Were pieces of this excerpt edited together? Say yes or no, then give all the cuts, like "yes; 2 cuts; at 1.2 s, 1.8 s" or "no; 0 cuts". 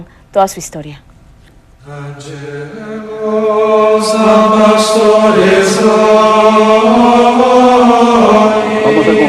yes; 1 cut; at 6.5 s